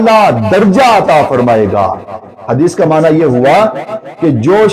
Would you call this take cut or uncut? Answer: uncut